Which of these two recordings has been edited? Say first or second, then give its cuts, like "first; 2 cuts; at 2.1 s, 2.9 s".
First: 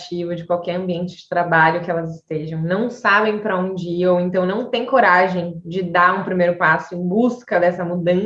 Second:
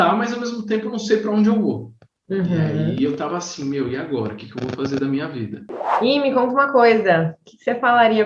second; 1 cut; at 5.6 s